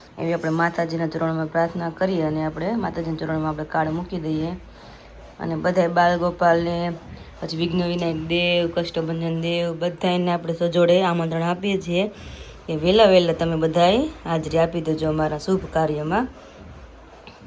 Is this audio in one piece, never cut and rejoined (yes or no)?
yes